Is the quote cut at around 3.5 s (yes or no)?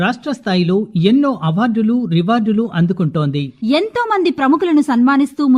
yes